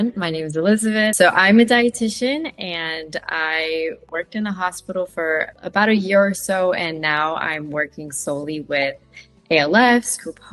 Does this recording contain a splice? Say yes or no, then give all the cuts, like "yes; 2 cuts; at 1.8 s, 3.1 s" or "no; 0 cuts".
yes; 1 cut; at 1.1 s